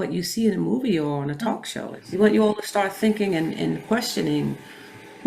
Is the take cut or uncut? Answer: cut